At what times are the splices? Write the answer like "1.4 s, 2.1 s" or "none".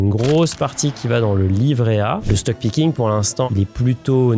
2.2 s, 3.5 s